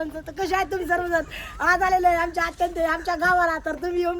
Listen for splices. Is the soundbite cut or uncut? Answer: uncut